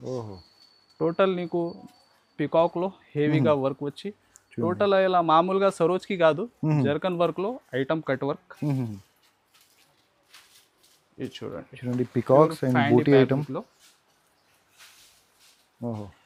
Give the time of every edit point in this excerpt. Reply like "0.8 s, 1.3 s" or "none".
none